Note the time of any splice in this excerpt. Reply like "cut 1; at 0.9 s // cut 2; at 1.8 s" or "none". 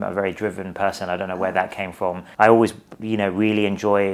cut 1; at 2.2 s